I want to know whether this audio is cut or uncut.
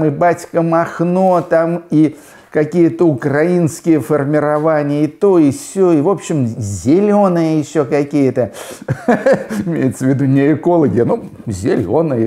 uncut